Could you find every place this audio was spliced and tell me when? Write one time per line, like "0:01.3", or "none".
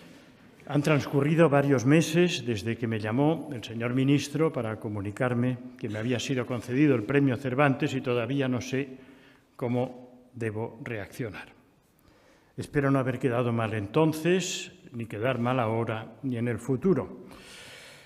0:06.9